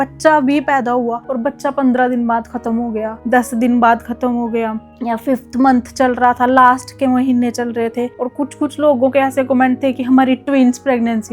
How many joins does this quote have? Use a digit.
0